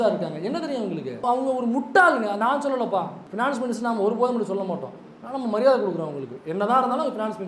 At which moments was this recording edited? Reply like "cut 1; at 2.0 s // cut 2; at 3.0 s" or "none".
cut 1; at 1.2 s // cut 2; at 3.2 s